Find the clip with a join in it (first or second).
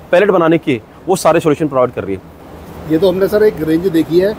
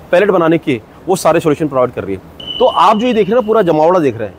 second